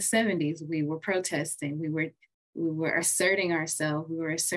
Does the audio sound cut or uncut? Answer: uncut